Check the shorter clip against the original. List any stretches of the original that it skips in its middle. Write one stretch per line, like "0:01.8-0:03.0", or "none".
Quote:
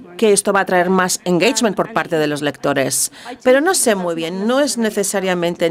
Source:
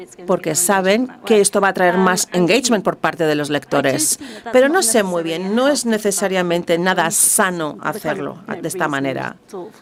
none